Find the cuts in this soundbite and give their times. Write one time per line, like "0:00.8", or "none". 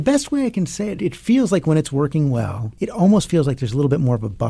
0:01.0
0:02.7